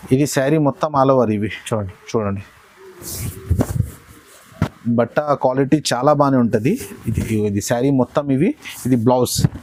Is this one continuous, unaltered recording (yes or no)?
yes